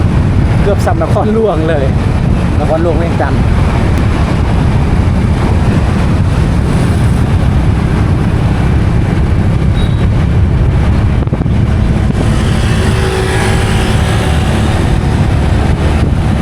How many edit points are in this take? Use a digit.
0